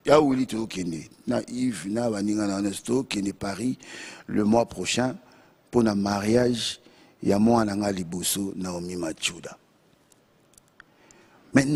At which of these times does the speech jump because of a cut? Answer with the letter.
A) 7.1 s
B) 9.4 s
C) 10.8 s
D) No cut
D